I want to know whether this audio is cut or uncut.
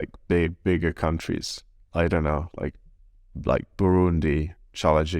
uncut